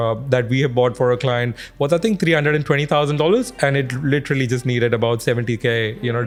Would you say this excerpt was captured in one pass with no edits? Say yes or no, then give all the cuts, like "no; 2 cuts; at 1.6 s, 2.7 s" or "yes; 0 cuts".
yes; 0 cuts